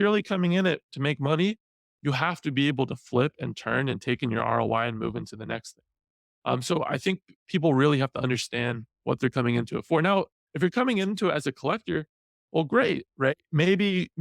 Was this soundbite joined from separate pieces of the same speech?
no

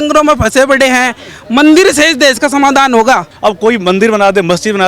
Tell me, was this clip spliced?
yes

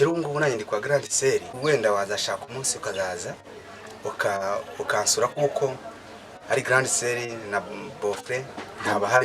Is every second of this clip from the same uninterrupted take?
no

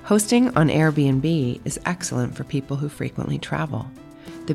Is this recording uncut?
yes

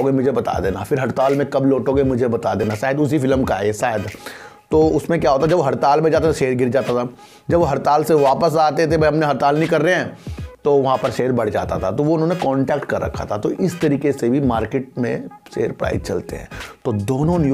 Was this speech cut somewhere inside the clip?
no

